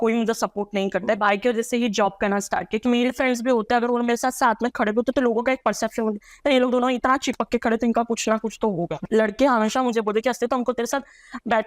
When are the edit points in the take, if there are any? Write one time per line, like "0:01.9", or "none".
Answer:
0:01.2
0:02.8
0:08.9